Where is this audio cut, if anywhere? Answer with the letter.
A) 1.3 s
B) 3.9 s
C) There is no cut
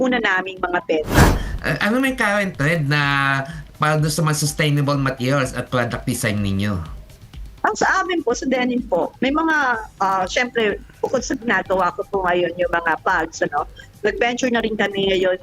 A